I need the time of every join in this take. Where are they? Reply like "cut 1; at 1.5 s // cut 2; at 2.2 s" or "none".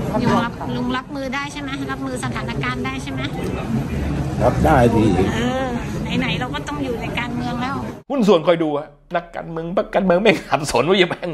cut 1; at 8.1 s